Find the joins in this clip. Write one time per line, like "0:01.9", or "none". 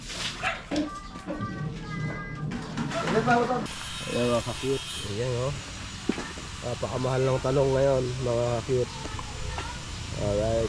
0:03.6